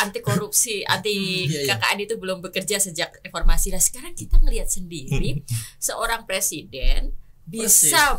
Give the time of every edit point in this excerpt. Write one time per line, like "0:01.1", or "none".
none